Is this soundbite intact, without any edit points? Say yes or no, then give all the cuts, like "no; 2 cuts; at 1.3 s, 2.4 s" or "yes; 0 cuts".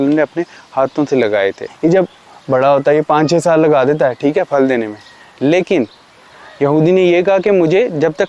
no; 1 cut; at 1.7 s